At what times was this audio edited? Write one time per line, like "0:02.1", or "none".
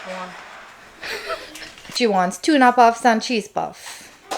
0:01.9